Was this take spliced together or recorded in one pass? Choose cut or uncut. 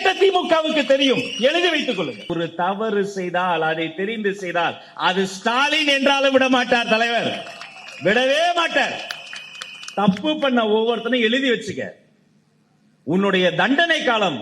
cut